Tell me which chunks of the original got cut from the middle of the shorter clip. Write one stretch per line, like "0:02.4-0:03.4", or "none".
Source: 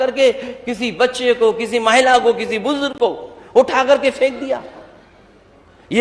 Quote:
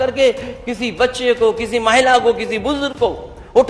none